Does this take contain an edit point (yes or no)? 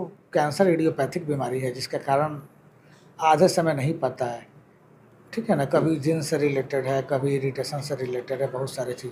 no